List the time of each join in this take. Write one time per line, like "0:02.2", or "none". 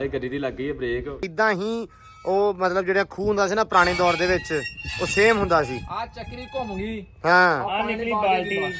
0:01.2